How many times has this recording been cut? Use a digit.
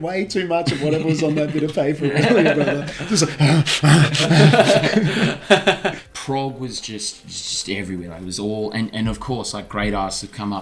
1